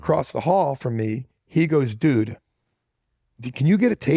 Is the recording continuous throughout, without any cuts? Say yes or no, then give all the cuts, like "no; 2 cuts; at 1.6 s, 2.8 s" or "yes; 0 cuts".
no; 1 cut; at 1.2 s